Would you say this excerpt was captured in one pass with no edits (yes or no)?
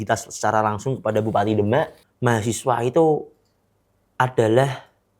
no